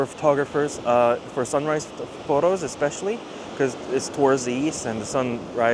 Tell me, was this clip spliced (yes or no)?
no